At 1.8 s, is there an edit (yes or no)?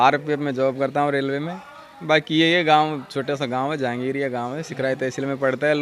no